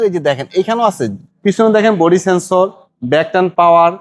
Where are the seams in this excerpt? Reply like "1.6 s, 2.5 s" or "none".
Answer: 1.2 s